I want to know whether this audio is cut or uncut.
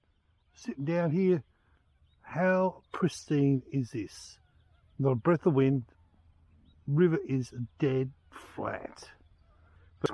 uncut